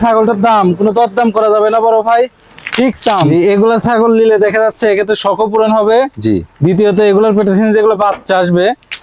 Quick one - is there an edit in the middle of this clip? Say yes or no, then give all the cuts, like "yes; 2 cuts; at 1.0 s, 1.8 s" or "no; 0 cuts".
yes; 1 cut; at 3.3 s